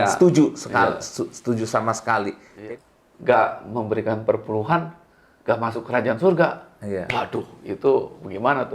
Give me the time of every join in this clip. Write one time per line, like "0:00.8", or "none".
0:02.5